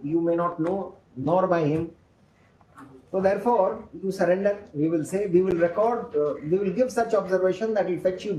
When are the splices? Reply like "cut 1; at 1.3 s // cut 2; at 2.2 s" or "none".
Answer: none